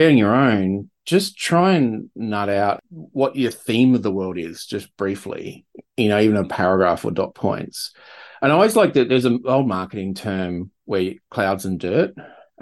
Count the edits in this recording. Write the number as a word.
one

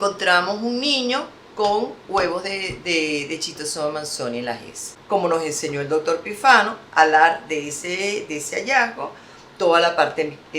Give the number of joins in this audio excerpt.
one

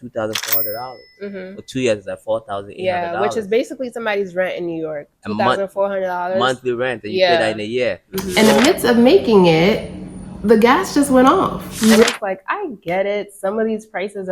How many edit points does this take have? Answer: two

